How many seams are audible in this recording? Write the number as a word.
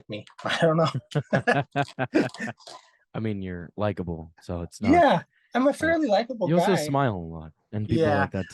zero